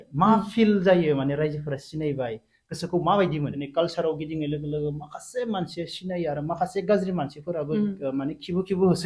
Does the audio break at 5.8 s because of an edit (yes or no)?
no